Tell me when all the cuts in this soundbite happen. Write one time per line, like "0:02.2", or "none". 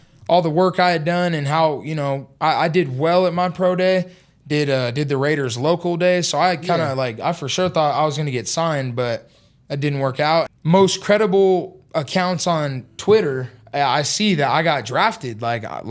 0:10.5